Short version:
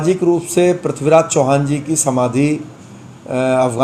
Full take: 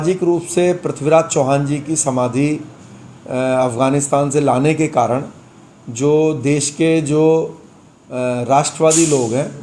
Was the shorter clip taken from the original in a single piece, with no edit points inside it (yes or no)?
yes